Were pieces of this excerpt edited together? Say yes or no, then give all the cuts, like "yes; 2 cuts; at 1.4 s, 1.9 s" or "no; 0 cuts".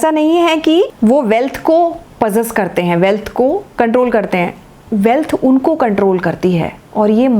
yes; 2 cuts; at 0.9 s, 3.7 s